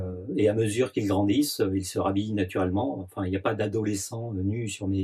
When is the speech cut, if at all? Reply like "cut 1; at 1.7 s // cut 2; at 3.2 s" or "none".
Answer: none